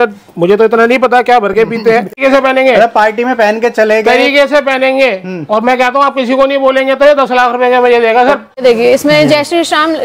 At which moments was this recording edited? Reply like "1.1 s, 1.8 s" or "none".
2.2 s, 8.6 s